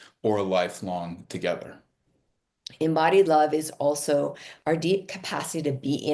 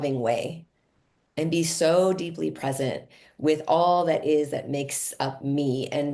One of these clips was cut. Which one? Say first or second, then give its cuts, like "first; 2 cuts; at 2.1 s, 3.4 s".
first; 1 cut; at 2.0 s